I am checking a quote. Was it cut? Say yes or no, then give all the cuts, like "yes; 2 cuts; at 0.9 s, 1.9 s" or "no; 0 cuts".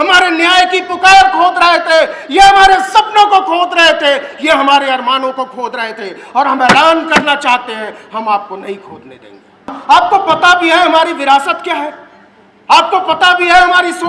yes; 1 cut; at 9.8 s